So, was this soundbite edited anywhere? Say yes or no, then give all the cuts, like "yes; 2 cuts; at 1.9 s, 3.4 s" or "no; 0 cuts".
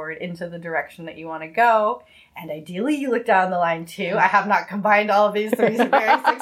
no; 0 cuts